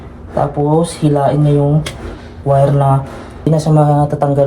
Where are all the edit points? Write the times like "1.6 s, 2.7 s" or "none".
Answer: 3.5 s